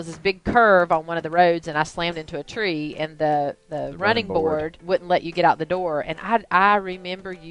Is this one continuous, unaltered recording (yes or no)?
no